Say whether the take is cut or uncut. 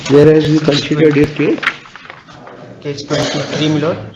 uncut